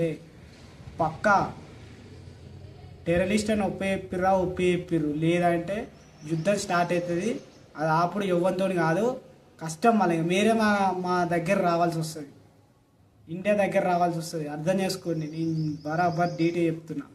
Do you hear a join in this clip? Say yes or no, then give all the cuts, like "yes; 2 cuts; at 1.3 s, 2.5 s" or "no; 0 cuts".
no; 0 cuts